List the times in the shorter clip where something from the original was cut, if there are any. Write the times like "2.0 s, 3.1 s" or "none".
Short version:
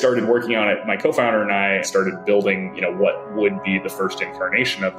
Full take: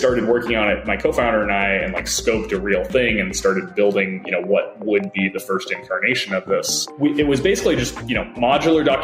1.8 s